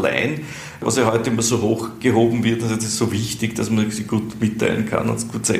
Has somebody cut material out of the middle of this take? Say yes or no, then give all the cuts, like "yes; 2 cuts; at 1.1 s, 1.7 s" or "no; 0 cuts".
yes; 2 cuts; at 0.8 s, 1.9 s